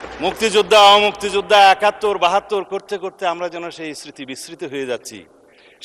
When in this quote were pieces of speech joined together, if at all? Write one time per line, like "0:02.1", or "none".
none